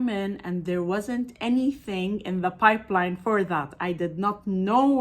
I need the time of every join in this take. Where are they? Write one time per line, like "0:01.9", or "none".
none

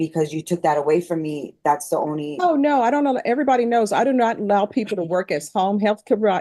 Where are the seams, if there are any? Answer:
none

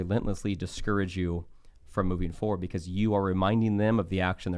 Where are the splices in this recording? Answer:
none

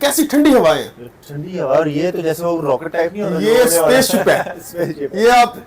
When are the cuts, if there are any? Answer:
none

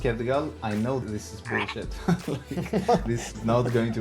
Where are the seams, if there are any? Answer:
0:01.0
0:03.0

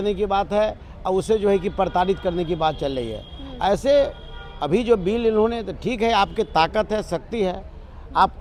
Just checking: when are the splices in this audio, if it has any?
none

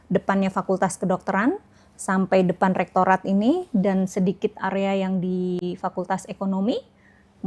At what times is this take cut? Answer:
none

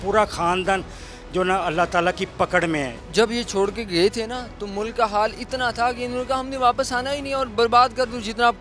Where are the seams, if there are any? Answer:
0:03.0

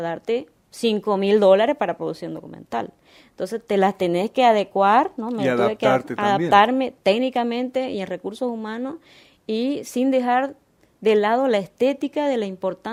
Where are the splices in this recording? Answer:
none

